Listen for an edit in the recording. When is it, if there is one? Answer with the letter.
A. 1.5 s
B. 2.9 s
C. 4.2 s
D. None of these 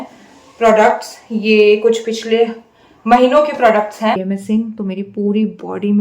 C